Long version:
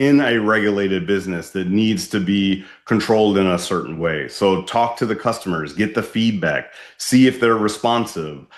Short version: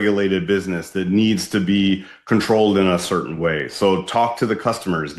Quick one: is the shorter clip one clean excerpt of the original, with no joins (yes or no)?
yes